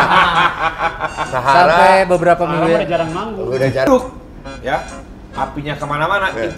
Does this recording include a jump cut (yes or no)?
yes